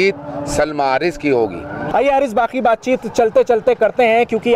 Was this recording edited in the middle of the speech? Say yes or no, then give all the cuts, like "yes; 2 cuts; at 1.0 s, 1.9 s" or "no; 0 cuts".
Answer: no; 0 cuts